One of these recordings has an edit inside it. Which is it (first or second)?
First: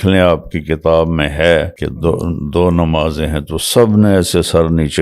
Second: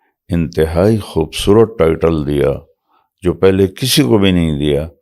first